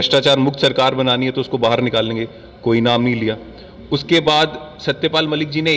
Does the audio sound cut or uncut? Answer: uncut